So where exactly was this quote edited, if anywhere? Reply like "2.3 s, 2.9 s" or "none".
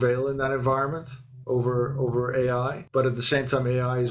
2.8 s